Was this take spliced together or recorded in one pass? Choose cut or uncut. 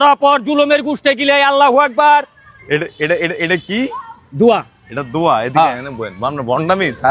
uncut